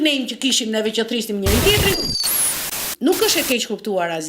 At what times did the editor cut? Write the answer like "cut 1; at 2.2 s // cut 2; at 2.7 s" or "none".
cut 1; at 2.3 s